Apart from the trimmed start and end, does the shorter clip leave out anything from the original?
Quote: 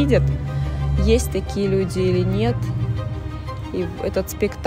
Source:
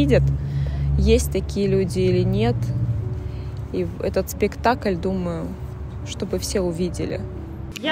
no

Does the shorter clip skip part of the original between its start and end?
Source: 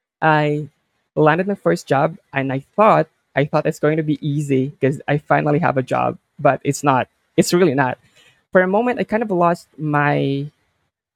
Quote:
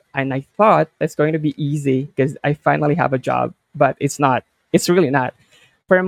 yes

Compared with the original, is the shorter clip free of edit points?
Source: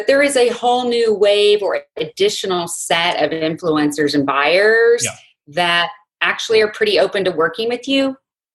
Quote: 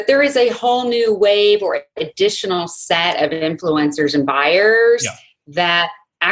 yes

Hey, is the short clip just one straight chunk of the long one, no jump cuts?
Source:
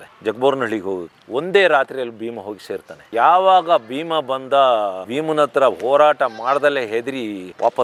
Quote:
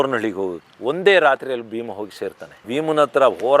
no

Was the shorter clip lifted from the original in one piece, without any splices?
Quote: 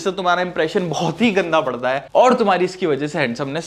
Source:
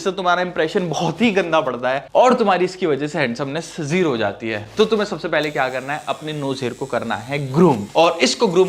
yes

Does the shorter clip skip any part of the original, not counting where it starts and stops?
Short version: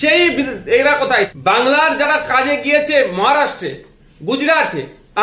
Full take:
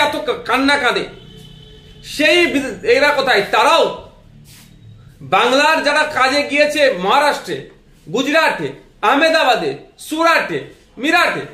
yes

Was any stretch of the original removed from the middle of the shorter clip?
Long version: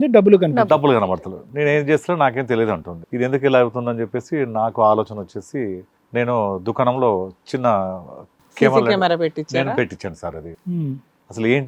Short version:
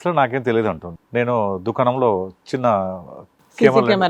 yes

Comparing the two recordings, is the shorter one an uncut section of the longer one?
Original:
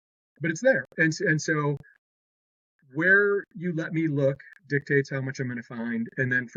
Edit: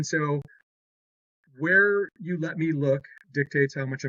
yes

